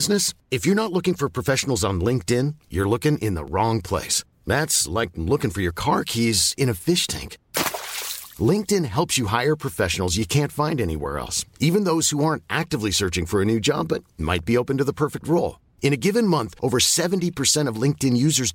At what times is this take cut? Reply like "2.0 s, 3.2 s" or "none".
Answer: none